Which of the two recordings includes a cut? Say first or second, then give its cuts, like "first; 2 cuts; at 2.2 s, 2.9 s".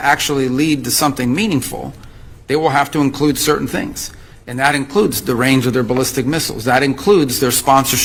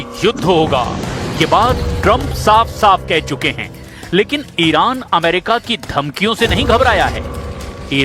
second; 1 cut; at 6.6 s